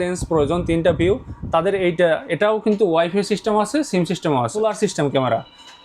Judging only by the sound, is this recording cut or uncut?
cut